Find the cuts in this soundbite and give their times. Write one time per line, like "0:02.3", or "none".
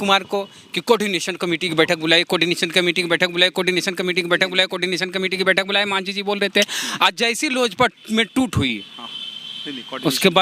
none